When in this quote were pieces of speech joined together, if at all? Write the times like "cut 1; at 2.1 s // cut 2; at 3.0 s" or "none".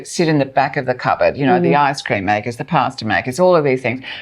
none